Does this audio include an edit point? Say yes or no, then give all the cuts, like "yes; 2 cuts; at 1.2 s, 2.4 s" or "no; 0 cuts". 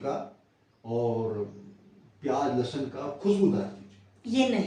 no; 0 cuts